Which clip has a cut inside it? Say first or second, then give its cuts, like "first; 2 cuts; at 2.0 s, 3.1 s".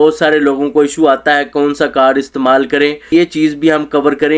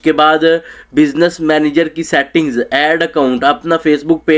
first; 1 cut; at 3.1 s